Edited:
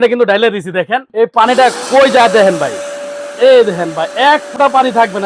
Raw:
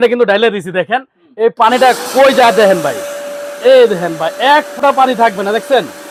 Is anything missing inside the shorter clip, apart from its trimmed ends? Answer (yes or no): yes